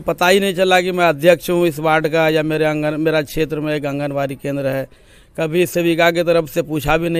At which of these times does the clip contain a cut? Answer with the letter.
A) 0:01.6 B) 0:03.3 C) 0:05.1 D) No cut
D